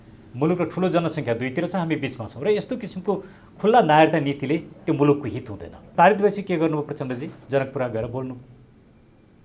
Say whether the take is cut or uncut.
cut